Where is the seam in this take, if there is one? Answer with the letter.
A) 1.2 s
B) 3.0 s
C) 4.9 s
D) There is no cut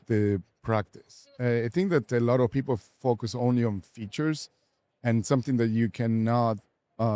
A